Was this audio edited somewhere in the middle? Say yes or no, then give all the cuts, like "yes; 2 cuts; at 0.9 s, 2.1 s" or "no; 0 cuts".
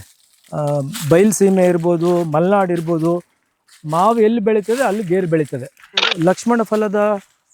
yes; 1 cut; at 6.1 s